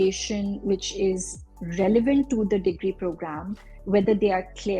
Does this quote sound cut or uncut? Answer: uncut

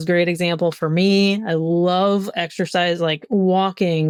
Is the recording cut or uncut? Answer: uncut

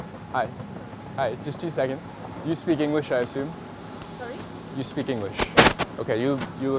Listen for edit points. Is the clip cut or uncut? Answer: uncut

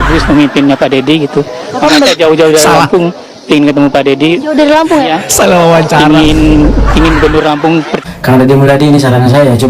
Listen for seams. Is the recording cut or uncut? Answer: cut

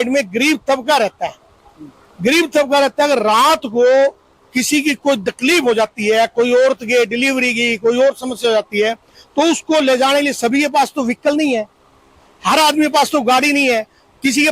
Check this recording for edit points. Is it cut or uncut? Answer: uncut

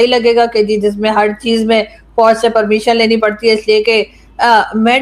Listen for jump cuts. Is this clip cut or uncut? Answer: uncut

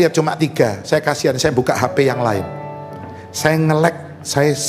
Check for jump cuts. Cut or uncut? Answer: uncut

